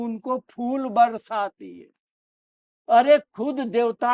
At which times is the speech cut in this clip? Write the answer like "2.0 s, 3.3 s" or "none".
2.7 s